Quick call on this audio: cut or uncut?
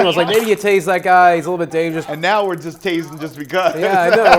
cut